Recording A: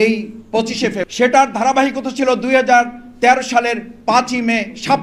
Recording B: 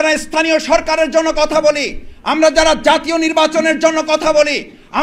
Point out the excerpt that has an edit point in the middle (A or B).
A